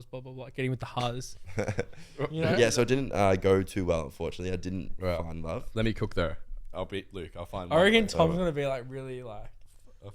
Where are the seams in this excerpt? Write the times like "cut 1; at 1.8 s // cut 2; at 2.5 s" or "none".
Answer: cut 1; at 2.5 s // cut 2; at 6.6 s